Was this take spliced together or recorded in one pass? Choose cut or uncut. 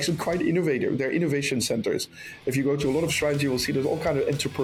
uncut